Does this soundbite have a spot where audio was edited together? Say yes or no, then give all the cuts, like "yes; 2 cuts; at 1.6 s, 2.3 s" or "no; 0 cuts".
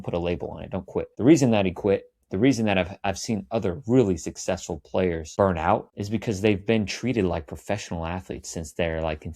yes; 3 cuts; at 1.1 s, 5.2 s, 5.9 s